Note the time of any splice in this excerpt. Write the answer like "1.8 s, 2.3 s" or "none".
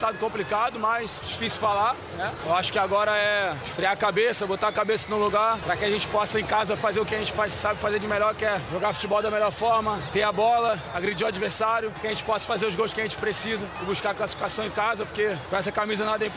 1.2 s, 2.4 s, 3.6 s, 5.6 s, 8.7 s, 10.0 s, 12.0 s, 13.8 s, 15.4 s